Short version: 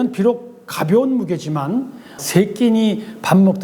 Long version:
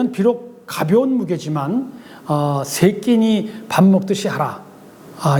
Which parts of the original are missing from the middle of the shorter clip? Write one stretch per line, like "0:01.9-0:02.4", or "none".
0:02.2-0:02.7